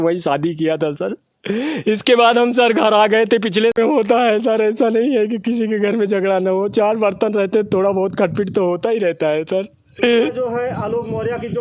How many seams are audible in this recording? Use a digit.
1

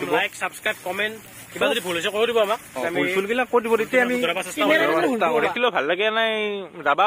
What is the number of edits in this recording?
1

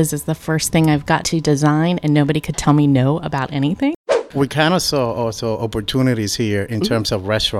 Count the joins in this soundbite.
1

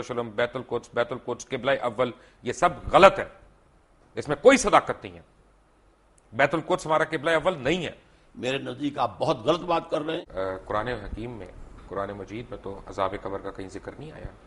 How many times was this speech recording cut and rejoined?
1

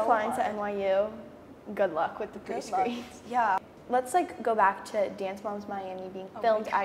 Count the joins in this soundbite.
1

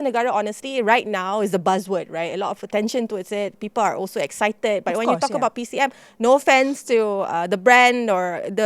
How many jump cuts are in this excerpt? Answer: 0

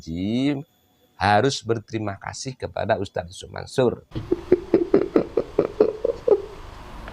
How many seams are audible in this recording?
1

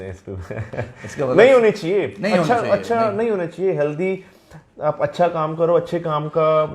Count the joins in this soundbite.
0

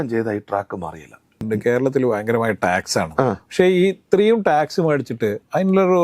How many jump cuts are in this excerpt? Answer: 1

